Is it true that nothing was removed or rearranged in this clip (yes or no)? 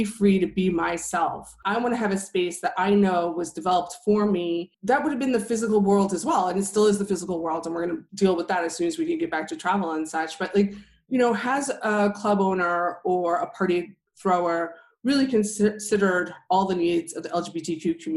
no